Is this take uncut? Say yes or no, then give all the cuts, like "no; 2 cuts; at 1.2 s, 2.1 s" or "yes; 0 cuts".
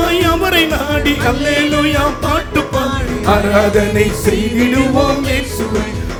yes; 0 cuts